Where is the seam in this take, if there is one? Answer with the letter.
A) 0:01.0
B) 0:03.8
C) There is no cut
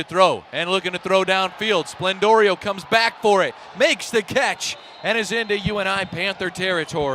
C